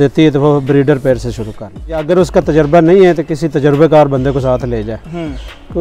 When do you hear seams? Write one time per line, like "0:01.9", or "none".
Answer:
0:02.0